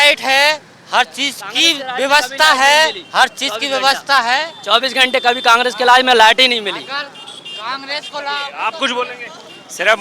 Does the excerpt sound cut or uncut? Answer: uncut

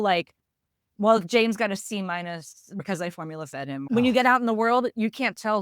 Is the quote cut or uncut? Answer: cut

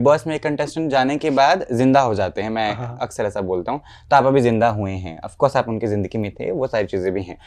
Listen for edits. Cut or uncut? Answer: uncut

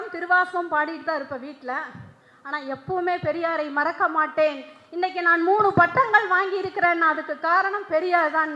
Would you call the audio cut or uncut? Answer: uncut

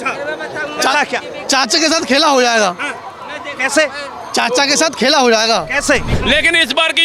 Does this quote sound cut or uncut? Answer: cut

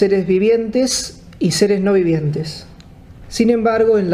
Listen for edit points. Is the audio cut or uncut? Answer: uncut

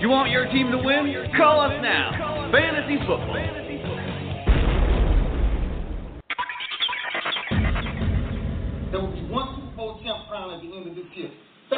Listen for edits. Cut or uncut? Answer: cut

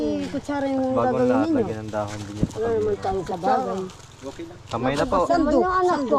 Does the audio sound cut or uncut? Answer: uncut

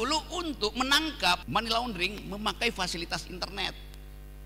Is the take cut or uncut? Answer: cut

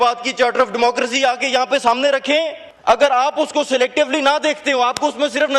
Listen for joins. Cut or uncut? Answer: cut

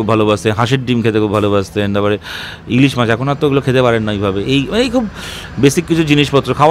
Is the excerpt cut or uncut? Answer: uncut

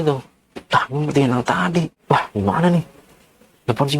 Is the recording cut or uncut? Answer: cut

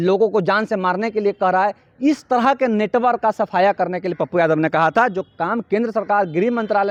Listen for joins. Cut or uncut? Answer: uncut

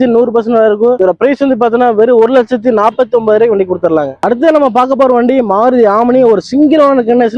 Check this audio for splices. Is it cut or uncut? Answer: cut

